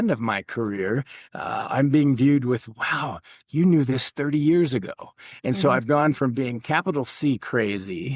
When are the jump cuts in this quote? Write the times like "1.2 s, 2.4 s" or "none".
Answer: none

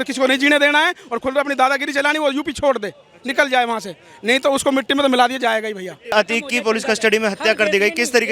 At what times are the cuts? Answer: 6.1 s

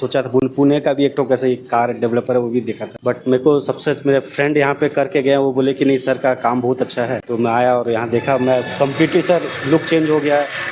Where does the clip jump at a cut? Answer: 2.8 s, 7.2 s

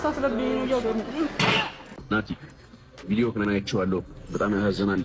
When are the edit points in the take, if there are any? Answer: 1.9 s

